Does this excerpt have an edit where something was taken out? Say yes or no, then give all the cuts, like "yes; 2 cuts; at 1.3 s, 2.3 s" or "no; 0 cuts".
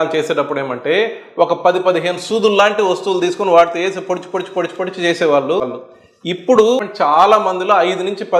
yes; 2 cuts; at 5.8 s, 6.8 s